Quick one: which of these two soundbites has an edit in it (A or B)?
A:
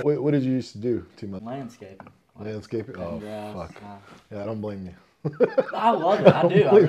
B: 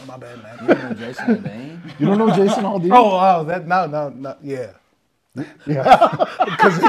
A